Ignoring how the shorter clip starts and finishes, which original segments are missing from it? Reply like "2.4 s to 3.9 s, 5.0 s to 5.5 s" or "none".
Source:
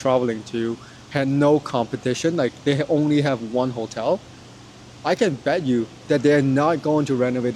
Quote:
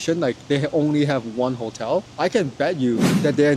4.3 s to 5.0 s